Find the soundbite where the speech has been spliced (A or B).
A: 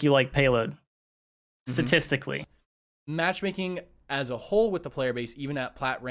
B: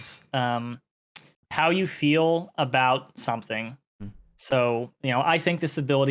A